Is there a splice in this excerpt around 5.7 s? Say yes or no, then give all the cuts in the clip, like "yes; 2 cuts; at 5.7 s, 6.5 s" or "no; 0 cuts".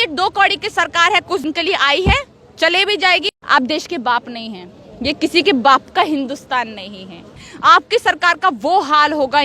no; 3 cuts; at 1.4 s, 3.4 s, 7.4 s